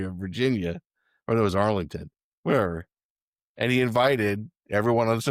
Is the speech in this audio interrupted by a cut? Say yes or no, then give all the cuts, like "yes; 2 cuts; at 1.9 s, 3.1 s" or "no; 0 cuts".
no; 0 cuts